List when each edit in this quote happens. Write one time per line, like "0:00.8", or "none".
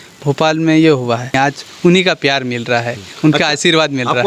0:01.4